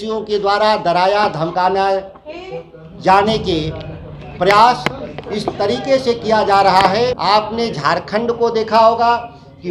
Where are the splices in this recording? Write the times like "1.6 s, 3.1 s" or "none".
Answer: 7.2 s